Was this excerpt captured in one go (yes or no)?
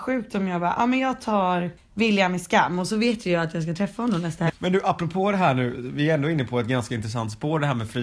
no